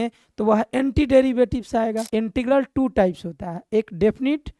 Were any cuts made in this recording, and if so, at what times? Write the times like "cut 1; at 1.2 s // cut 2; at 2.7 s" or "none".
cut 1; at 2.0 s

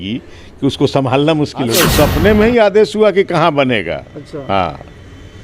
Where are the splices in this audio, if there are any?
cut 1; at 1.8 s

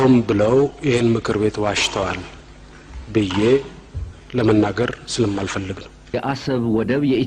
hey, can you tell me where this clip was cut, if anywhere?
cut 1; at 6.1 s

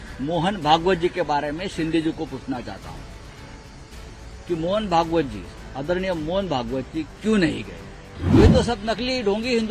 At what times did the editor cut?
cut 1; at 8.4 s

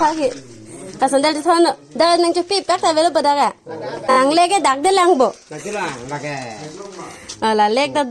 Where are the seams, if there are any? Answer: cut 1; at 4.2 s

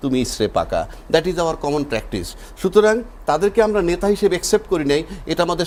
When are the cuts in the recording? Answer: none

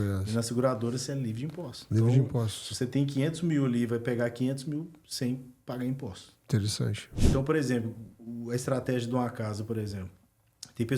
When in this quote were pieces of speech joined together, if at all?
cut 1; at 7.0 s

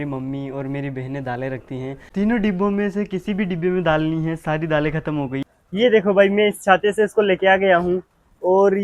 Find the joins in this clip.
cut 1; at 2.0 s // cut 2; at 5.4 s

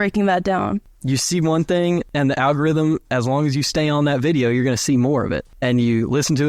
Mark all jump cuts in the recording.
cut 1; at 0.9 s // cut 2; at 2.1 s // cut 3; at 5.5 s

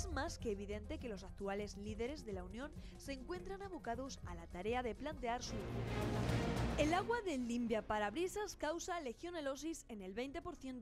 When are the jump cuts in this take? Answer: cut 1; at 5.8 s

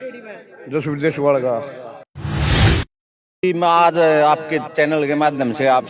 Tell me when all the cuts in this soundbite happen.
cut 1; at 2.1 s // cut 2; at 3.4 s

